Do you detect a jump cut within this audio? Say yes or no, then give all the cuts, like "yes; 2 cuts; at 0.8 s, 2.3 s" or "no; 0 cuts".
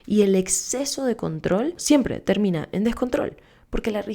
yes; 1 cut; at 1.8 s